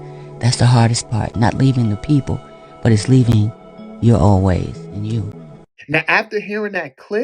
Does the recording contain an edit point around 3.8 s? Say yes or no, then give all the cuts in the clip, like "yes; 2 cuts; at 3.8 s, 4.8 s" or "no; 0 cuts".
no; 1 cut; at 5.7 s